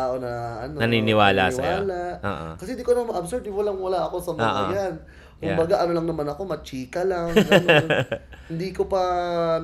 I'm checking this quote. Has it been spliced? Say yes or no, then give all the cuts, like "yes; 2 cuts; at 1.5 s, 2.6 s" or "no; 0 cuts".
no; 0 cuts